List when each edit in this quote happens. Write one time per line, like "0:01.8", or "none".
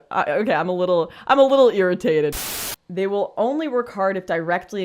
0:02.3